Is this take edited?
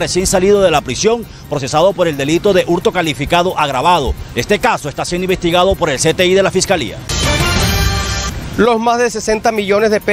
yes; 2 cuts; at 7.1 s, 8.3 s

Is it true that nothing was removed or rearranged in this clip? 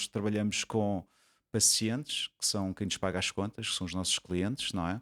yes; 0 cuts

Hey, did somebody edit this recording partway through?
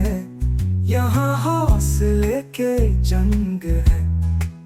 no; 0 cuts

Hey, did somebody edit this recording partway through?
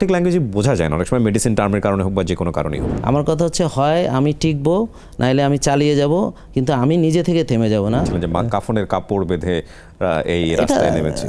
yes; 2 cuts; at 2.9 s, 8.1 s

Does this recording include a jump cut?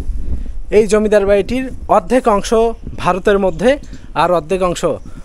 no; 0 cuts

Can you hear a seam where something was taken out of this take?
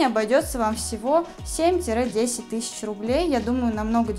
no; 0 cuts

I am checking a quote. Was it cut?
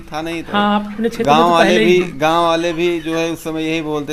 no; 0 cuts

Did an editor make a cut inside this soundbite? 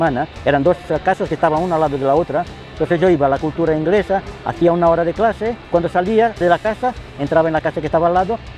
no; 0 cuts

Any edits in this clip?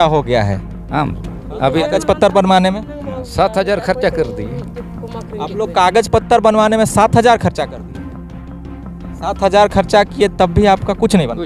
no; 0 cuts

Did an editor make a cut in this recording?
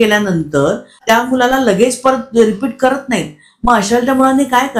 yes; 1 cut; at 1.0 s

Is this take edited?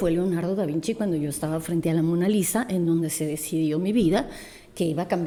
no; 0 cuts

